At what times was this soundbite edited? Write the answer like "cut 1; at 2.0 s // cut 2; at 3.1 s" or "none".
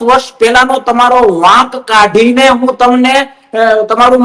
none